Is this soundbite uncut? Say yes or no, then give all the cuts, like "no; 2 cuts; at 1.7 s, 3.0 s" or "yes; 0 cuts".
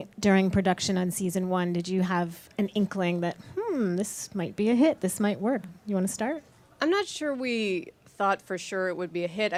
yes; 0 cuts